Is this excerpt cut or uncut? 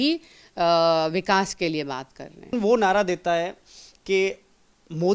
cut